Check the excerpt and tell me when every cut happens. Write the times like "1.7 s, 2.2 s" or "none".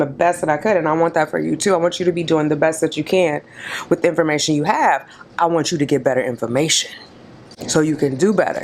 none